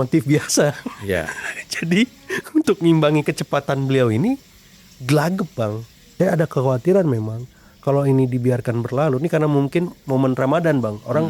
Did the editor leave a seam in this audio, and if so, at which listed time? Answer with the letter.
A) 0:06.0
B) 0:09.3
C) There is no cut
A